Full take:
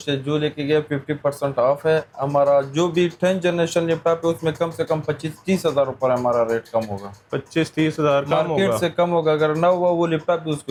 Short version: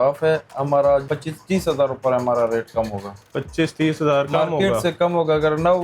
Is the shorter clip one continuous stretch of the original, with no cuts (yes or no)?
no